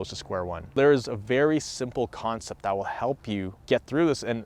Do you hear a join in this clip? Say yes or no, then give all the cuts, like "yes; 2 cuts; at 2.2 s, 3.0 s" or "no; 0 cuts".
yes; 2 cuts; at 0.8 s, 3.6 s